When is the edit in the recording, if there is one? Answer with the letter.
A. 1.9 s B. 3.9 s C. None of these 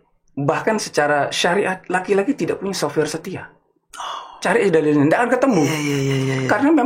C